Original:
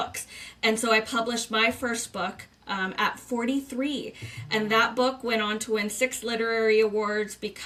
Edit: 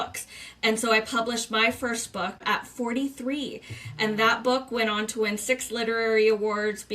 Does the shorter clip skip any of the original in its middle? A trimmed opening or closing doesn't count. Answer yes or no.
yes